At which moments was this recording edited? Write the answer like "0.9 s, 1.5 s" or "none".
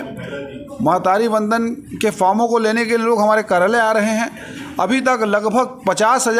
none